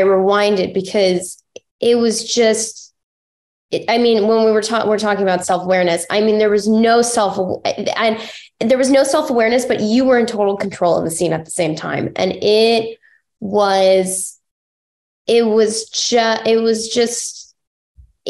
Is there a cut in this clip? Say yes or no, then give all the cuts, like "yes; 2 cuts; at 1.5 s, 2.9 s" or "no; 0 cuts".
no; 0 cuts